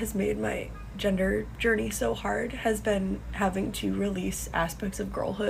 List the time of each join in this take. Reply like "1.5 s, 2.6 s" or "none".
none